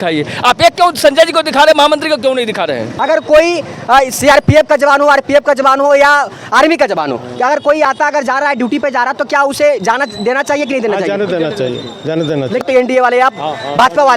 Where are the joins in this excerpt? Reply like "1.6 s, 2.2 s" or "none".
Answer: 2.9 s, 12.6 s